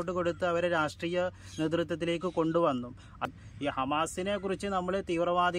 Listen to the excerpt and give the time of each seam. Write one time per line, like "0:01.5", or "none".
0:03.2